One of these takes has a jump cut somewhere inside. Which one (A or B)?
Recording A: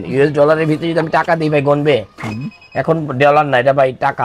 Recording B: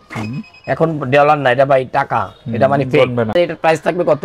B